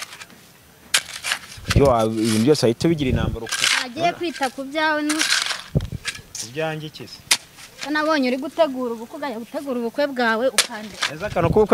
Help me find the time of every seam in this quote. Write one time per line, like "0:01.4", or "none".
none